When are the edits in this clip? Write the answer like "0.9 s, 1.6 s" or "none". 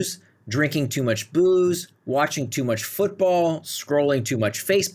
none